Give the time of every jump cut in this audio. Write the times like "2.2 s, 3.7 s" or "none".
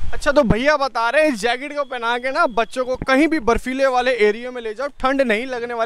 none